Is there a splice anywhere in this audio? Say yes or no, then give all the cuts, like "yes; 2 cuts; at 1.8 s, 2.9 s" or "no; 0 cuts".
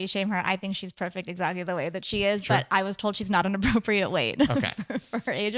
no; 0 cuts